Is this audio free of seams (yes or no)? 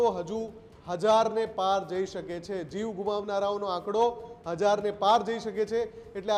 yes